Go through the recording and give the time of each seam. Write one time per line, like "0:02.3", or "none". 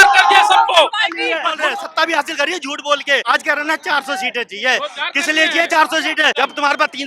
0:01.5
0:03.2
0:06.3